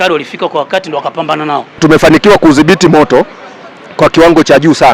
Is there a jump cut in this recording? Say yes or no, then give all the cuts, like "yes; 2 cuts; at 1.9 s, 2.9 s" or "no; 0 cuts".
yes; 1 cut; at 1.8 s